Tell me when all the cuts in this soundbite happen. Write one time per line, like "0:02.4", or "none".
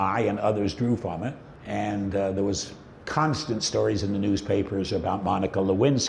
0:01.5